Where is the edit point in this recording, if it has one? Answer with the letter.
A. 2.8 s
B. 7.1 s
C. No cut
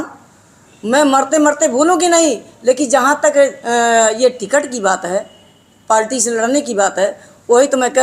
C